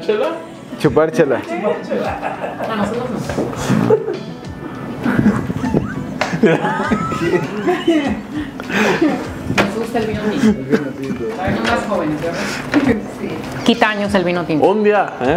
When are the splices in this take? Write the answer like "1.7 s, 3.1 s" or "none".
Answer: 1.4 s